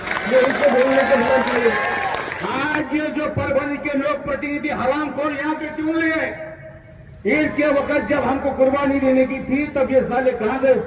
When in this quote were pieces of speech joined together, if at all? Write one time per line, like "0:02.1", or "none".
0:02.3

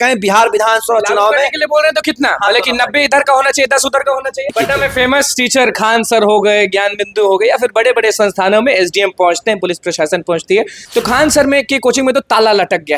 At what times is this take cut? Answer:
0:04.5
0:10.8

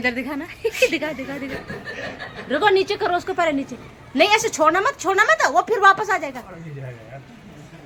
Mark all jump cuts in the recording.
none

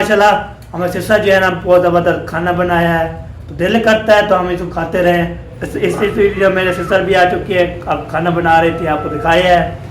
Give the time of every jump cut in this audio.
0:05.7

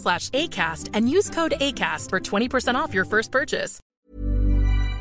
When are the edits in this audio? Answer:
0:03.8

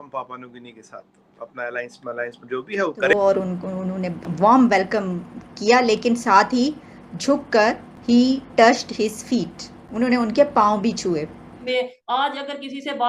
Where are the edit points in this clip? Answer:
0:03.1
0:11.5

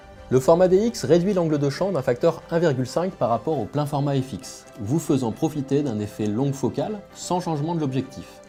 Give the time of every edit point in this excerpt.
none

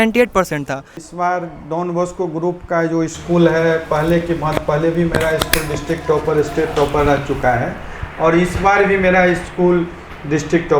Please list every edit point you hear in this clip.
0:01.0

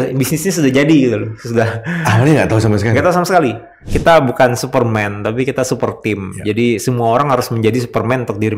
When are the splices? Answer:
0:03.9

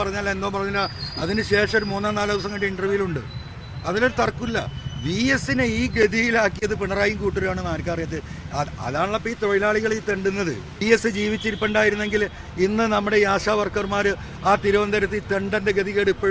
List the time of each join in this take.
0:10.8

